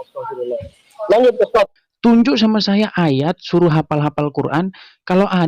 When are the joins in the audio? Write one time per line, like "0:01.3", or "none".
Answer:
0:01.8